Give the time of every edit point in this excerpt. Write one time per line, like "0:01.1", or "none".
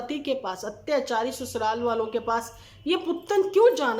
none